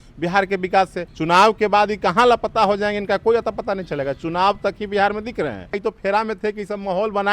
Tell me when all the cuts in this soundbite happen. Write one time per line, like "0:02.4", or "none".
0:01.1
0:05.8